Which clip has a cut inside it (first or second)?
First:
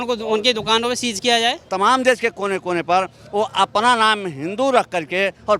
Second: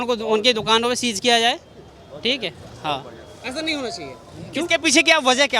first